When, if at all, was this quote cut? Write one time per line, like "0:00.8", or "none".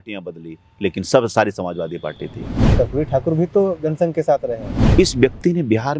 0:02.7
0:04.7